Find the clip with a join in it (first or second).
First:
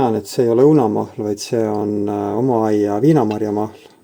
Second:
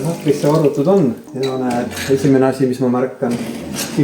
second